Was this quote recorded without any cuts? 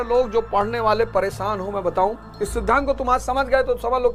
yes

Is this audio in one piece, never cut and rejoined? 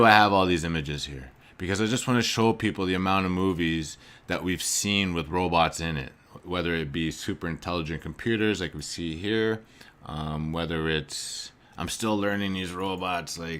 no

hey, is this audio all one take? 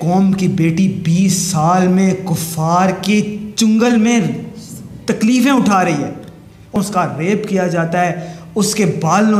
no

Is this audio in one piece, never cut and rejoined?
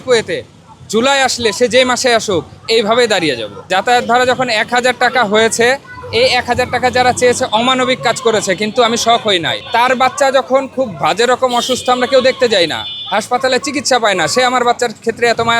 no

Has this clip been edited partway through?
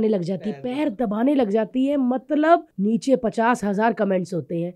yes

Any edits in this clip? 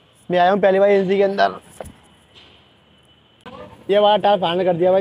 yes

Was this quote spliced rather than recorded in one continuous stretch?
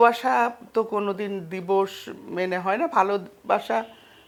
no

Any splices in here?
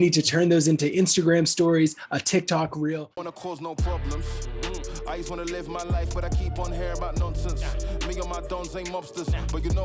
yes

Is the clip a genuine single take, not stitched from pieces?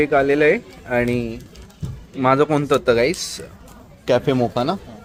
yes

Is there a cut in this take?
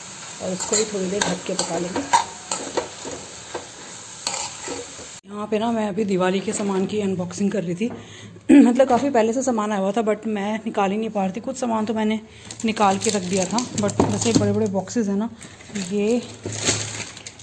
no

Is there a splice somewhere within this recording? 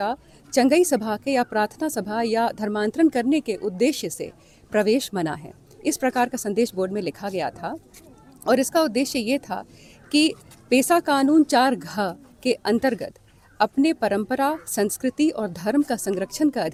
no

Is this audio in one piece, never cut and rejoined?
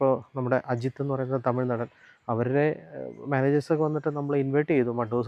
yes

